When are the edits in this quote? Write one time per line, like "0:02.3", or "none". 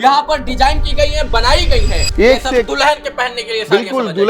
0:02.0

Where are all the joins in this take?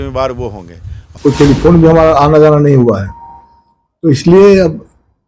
0:01.1

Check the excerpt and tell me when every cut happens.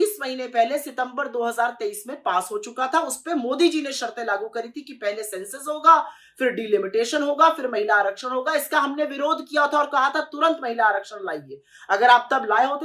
none

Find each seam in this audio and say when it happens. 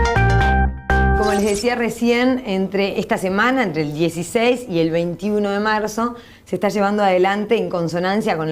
0:01.2

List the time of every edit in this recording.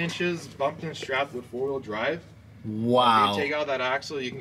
none

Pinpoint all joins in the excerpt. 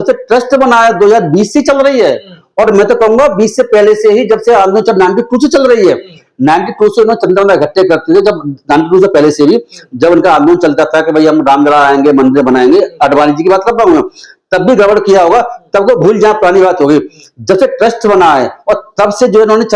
none

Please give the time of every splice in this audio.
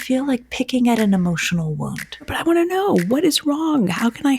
0:02.2

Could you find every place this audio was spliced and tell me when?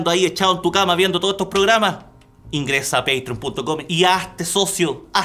none

